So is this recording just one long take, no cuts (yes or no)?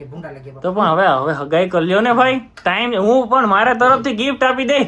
yes